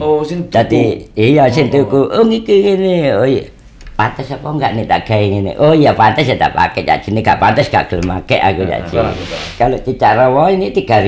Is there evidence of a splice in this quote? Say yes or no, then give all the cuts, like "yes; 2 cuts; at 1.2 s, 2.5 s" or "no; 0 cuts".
yes; 1 cut; at 8.9 s